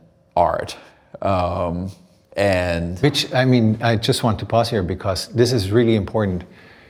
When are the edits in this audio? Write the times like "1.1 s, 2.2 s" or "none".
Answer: none